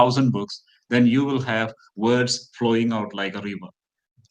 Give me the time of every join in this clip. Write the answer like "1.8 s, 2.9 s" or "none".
none